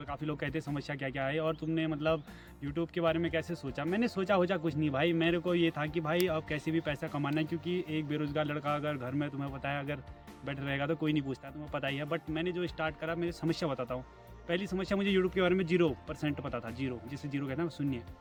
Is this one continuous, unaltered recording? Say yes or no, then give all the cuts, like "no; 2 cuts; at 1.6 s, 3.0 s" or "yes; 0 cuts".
yes; 0 cuts